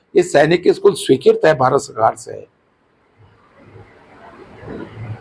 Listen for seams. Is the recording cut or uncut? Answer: uncut